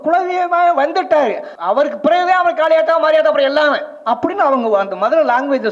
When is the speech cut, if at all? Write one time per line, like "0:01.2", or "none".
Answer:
0:01.5